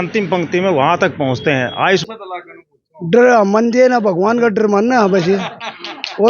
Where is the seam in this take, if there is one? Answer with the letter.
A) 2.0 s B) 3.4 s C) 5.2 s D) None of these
A